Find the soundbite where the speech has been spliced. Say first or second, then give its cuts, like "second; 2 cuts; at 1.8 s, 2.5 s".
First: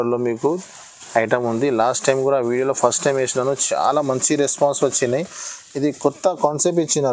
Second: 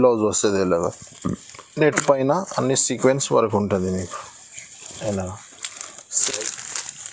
second; 1 cut; at 6.2 s